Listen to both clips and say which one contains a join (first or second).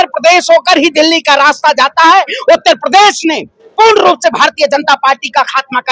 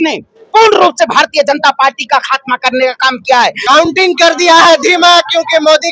second